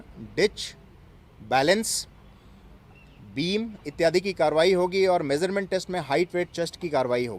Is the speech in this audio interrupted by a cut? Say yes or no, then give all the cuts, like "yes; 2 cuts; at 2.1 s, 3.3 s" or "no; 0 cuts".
no; 0 cuts